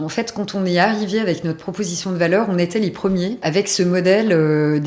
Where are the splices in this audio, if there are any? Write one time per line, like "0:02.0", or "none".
0:03.4